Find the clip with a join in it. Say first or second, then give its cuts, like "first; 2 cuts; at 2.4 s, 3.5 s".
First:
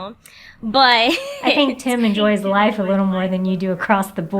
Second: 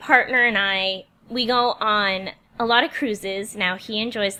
first; 1 cut; at 1.5 s